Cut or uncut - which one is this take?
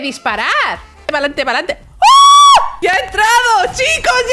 cut